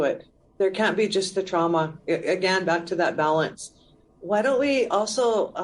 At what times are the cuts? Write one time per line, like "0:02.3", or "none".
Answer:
0:04.0